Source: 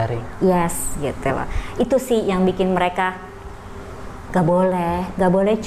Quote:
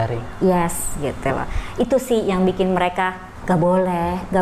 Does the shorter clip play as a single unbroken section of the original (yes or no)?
no